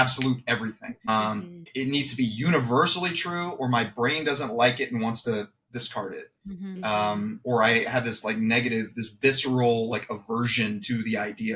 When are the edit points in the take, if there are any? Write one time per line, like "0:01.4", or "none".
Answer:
none